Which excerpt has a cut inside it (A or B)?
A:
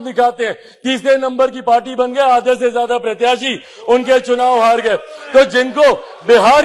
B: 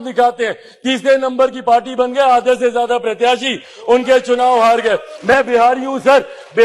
B